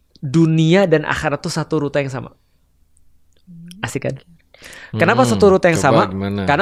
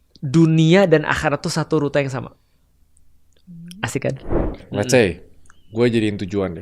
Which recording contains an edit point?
second; 1 cut; at 4.7 s

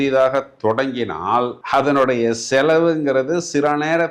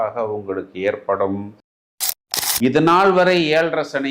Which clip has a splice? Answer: second; 1 cut; at 1.9 s

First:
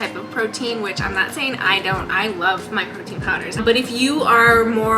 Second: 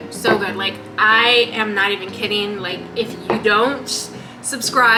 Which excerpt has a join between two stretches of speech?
first; 1 cut; at 3.6 s

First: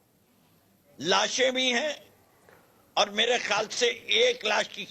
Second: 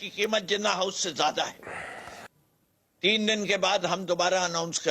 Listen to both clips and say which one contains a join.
second; 1 cut; at 2.2 s

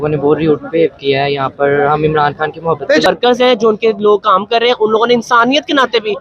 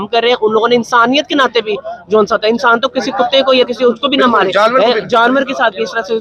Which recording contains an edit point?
first; 1 cut; at 3.1 s

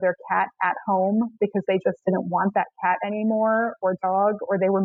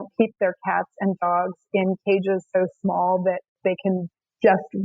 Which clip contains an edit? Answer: second; 1 cut; at 3.5 s

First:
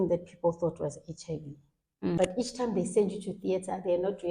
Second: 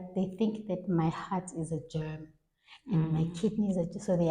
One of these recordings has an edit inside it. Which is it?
first; 1 cut; at 2.2 s

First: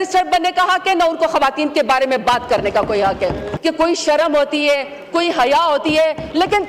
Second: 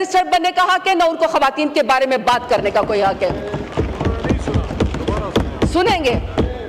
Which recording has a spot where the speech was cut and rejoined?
first; 1 cut; at 3.5 s

